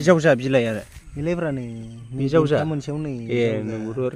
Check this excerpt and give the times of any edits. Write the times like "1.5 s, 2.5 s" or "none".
none